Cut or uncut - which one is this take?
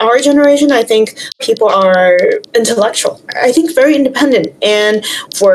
cut